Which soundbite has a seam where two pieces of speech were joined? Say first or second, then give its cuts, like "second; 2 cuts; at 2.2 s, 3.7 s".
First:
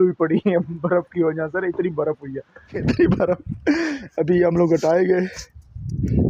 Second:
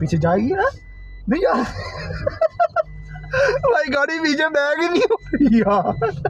first; 1 cut; at 2.7 s